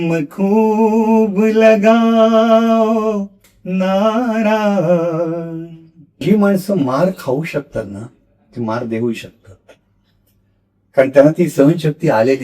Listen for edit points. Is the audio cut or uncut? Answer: cut